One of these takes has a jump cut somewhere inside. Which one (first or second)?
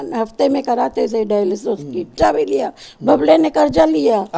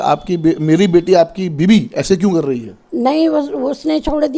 first